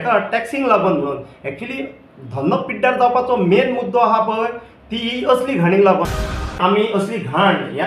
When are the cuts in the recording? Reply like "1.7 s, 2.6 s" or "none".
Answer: 6.5 s